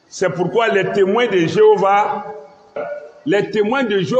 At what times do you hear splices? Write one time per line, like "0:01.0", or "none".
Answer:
0:02.8